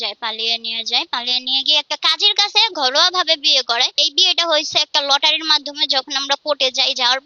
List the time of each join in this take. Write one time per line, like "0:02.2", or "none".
0:04.1